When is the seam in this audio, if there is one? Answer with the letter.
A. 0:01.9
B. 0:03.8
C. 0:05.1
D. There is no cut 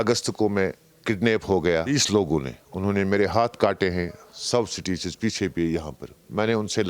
A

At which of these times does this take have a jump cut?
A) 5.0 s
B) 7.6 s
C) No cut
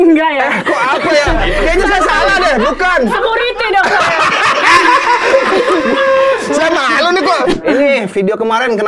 B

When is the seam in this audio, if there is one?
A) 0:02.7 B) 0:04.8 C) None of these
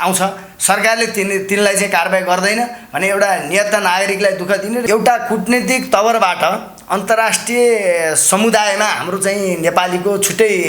B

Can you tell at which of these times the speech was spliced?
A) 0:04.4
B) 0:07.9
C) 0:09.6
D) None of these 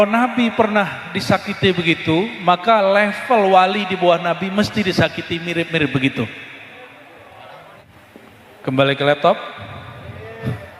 B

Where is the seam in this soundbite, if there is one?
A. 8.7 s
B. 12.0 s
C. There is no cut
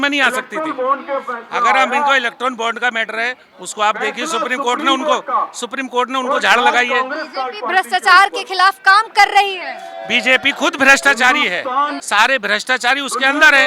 B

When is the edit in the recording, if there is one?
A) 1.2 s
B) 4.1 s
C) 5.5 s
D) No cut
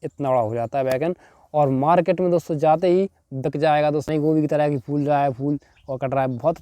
B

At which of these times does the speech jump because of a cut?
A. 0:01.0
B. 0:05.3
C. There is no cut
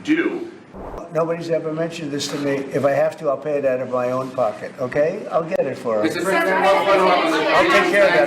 A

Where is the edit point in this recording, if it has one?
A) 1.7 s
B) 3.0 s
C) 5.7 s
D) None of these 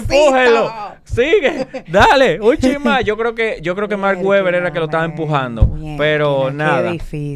D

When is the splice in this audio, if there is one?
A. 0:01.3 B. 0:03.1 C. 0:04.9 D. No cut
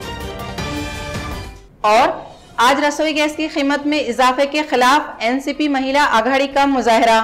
A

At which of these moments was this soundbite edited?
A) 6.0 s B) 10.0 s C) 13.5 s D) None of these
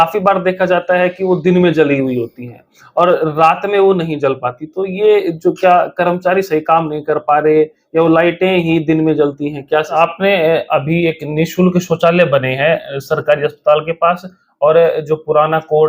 B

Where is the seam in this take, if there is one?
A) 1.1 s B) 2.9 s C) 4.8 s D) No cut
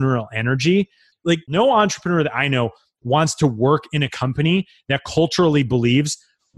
A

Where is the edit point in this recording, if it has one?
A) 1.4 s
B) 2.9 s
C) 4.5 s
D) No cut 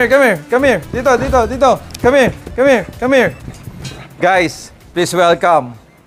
D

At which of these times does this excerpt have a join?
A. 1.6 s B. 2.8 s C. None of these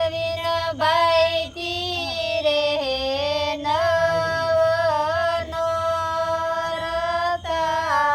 C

